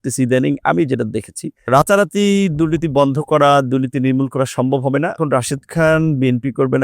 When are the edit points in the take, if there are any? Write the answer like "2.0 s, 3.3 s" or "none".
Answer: 1.7 s, 5.1 s